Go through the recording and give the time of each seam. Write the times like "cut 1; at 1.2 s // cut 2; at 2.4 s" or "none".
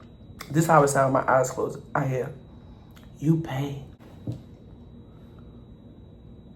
cut 1; at 3.9 s

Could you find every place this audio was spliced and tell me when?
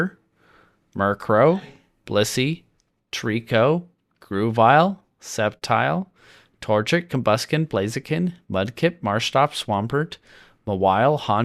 none

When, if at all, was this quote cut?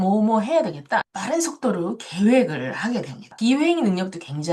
cut 1; at 3.3 s

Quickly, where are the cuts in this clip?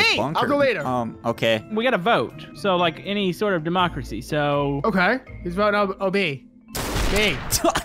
cut 1; at 1.7 s // cut 2; at 5.3 s

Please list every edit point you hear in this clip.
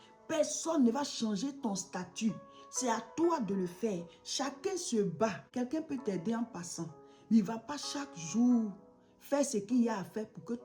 cut 1; at 5.4 s

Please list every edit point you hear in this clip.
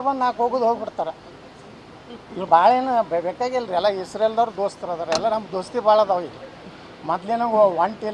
none

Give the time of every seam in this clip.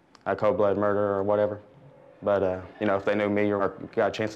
cut 1; at 2.7 s // cut 2; at 3.6 s

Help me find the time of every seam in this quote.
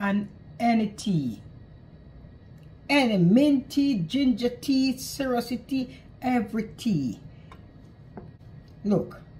cut 1; at 8.4 s

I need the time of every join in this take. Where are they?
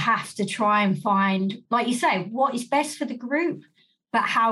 cut 1; at 1.6 s

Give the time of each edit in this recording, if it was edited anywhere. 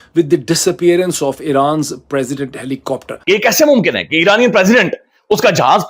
cut 1; at 3.1 s

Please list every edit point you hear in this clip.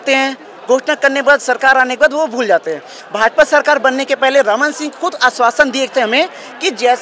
none

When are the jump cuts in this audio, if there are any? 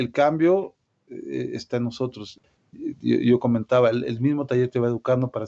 cut 1; at 2.3 s

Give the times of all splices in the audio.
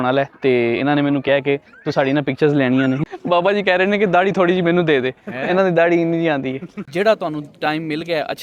cut 1; at 3.1 s // cut 2; at 6.8 s

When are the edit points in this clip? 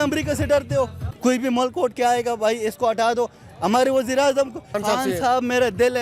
cut 1; at 1.0 s // cut 2; at 4.8 s

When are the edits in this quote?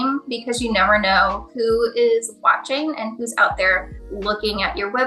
none

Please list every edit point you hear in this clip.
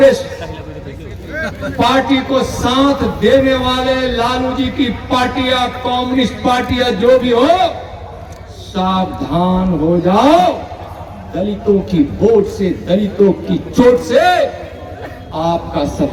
none

